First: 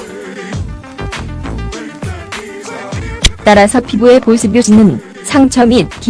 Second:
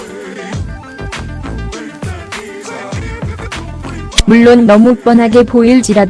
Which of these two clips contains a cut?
first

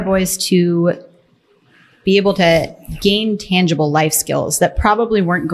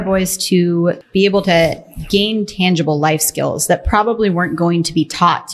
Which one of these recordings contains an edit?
second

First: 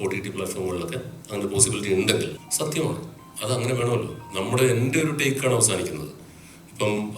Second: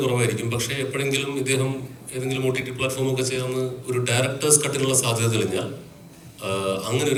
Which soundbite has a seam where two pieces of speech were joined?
first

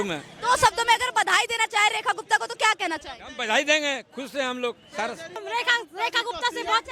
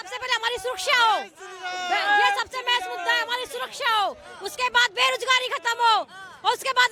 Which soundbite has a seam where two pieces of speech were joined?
first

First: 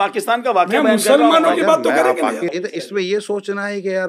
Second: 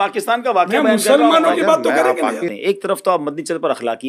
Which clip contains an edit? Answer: second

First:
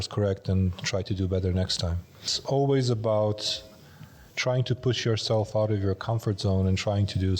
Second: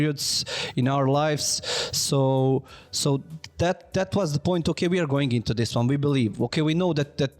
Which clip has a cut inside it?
first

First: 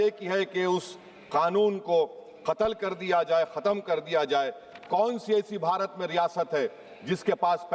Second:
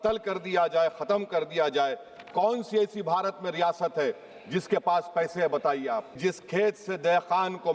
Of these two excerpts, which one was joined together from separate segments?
second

